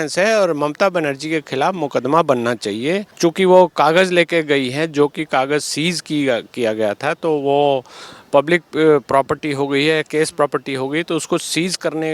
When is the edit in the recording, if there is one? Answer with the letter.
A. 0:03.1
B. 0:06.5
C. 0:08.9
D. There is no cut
A